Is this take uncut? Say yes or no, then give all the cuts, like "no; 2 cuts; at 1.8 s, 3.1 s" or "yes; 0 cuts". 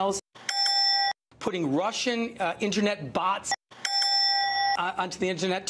no; 1 cut; at 2.1 s